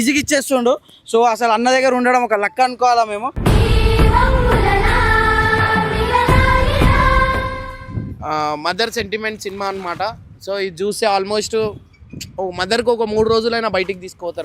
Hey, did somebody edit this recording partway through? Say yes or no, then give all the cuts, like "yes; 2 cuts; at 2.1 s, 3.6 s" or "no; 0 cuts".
yes; 1 cut; at 7.7 s